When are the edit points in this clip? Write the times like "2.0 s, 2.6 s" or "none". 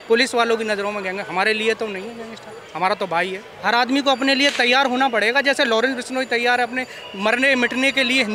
3.5 s